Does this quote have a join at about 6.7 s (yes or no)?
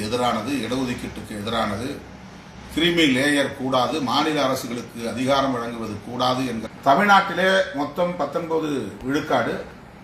yes